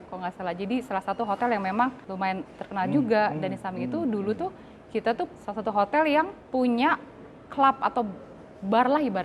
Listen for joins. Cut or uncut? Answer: cut